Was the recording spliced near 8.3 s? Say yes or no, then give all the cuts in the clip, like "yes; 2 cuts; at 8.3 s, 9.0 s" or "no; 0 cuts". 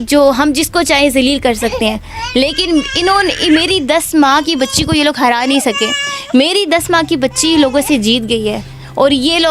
no; 0 cuts